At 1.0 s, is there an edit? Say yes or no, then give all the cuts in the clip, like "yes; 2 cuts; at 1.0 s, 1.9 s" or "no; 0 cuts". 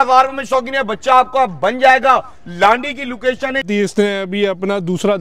no; 1 cut; at 3.7 s